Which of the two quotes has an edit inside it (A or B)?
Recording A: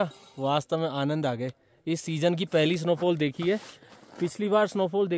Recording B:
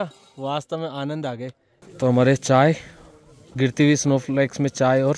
B